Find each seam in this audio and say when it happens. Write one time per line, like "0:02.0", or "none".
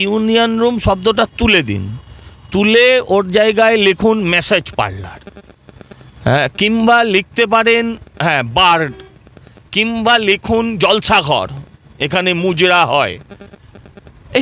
none